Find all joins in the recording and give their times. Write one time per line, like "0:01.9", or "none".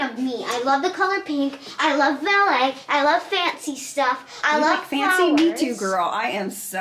0:04.3